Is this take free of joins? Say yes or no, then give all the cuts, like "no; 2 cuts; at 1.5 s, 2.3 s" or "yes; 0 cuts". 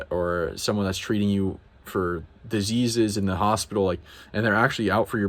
yes; 0 cuts